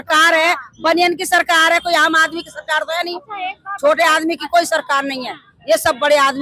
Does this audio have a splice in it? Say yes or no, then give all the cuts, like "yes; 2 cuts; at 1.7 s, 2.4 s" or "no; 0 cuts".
no; 0 cuts